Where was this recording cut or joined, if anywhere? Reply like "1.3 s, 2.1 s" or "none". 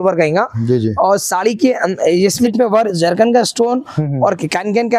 2.4 s